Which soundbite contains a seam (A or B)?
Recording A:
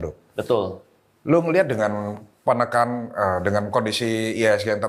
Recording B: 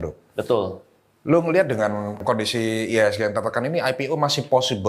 B